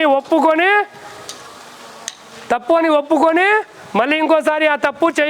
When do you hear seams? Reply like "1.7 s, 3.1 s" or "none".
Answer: none